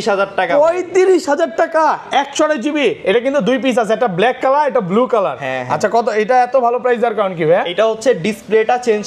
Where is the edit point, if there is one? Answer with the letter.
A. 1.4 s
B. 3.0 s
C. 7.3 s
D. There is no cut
D